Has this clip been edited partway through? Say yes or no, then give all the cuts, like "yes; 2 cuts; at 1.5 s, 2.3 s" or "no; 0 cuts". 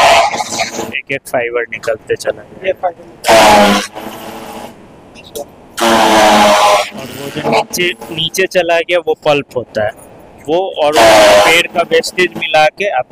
no; 0 cuts